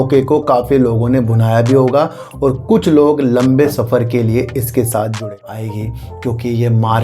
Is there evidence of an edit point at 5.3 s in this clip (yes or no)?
yes